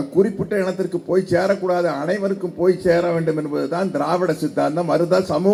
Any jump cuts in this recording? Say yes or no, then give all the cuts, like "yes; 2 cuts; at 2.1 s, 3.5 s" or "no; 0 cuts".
no; 0 cuts